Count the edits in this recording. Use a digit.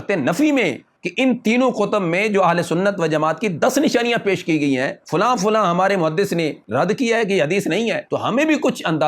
3